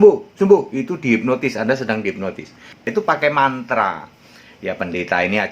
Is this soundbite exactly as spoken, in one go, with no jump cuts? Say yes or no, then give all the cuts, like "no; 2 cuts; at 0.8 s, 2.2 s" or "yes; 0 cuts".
no; 1 cut; at 2.8 s